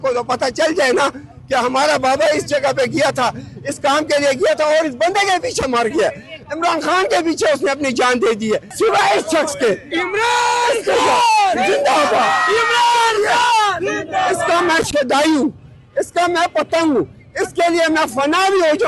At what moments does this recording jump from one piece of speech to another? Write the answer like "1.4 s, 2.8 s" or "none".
3.1 s, 8.7 s